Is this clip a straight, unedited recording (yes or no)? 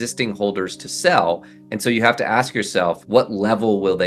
no